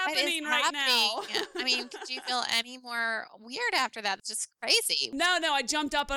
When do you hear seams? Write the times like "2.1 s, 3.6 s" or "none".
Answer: 5.0 s